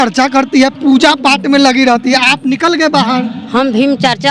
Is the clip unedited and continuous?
yes; 0 cuts

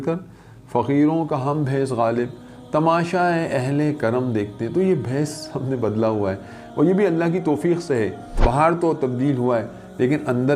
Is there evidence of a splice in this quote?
yes; 1 cut; at 8.3 s

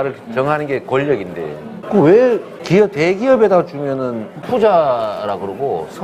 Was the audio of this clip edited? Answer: no; 0 cuts

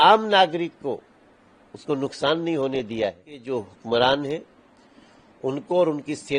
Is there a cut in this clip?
yes; 1 cut; at 3.3 s

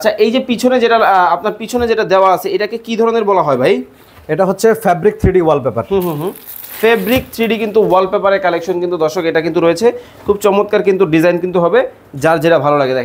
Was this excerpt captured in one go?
yes; 0 cuts

